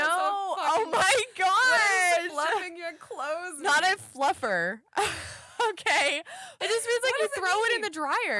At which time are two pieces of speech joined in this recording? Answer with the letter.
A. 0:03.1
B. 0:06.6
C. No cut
B